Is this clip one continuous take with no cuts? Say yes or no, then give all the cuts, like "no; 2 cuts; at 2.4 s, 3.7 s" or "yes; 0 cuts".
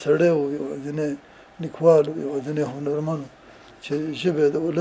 yes; 0 cuts